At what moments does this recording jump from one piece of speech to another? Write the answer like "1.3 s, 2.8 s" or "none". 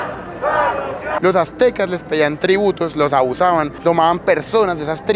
1.1 s